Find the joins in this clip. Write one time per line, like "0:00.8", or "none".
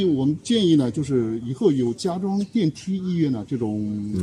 none